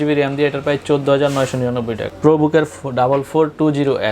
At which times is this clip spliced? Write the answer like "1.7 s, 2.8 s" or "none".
2.0 s